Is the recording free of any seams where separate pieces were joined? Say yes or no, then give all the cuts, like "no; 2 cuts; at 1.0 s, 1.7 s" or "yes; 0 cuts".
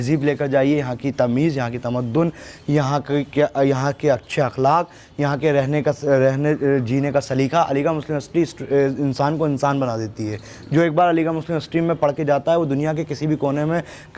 yes; 0 cuts